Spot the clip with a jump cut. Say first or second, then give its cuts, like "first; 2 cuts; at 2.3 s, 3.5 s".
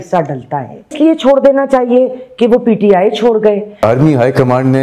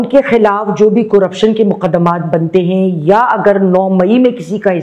first; 2 cuts; at 0.9 s, 3.8 s